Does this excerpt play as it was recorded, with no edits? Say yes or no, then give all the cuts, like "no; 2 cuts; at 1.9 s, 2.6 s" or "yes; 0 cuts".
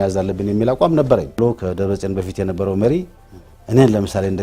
no; 1 cut; at 1.4 s